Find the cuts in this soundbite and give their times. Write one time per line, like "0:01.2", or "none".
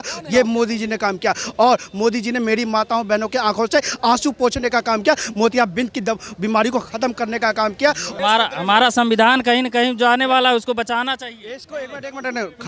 0:08.1